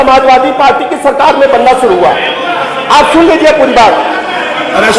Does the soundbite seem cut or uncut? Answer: uncut